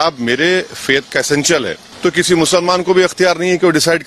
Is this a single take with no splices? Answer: no; 1 cut; at 1.8 s

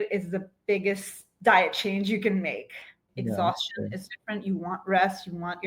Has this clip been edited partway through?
yes; 1 cut; at 3.0 s

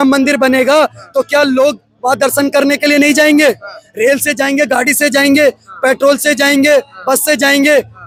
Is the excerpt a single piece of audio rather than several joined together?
yes; 0 cuts

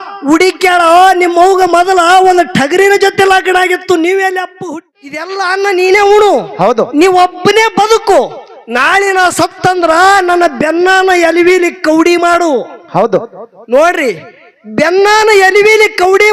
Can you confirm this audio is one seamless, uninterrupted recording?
no; 1 cut; at 4.8 s

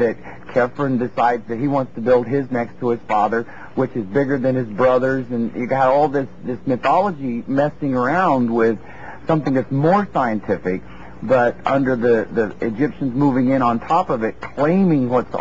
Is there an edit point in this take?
yes; 1 cut; at 1.8 s

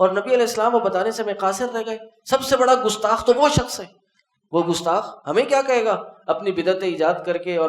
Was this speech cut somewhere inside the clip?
no; 0 cuts

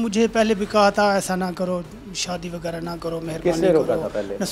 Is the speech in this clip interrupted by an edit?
no; 0 cuts

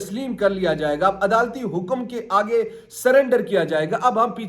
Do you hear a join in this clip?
no; 0 cuts

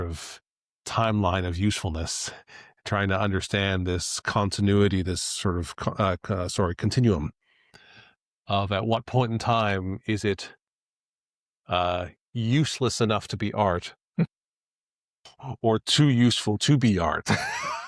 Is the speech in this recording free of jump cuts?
yes; 0 cuts

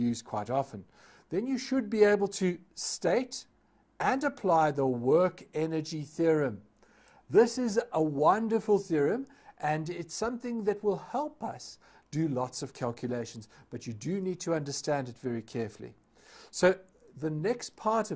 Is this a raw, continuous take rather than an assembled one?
yes; 0 cuts

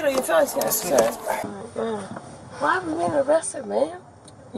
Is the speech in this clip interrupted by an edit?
yes; 1 cut; at 1.4 s

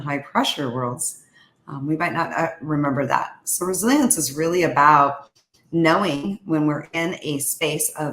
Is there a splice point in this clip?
no; 0 cuts

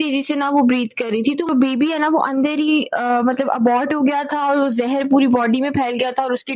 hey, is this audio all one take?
no; 1 cut; at 1.2 s

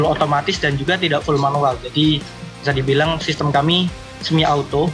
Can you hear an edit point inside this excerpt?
no; 0 cuts

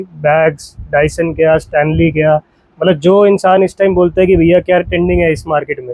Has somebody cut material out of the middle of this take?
no; 0 cuts

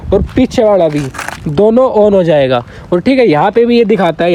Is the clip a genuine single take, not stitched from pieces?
yes; 0 cuts

